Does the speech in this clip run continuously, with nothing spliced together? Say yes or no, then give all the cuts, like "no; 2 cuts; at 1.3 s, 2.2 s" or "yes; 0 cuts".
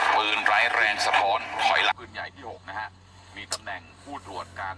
no; 1 cut; at 1.9 s